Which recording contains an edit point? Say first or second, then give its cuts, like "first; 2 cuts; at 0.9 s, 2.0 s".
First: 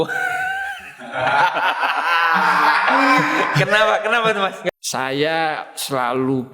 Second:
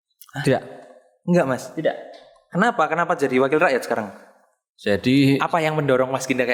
first; 1 cut; at 4.7 s